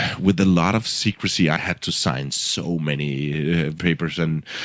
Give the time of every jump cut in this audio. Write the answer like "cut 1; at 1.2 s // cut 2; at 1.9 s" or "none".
cut 1; at 2.1 s // cut 2; at 3.8 s